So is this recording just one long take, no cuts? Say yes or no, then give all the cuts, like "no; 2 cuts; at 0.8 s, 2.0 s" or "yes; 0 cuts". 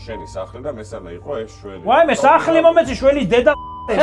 yes; 0 cuts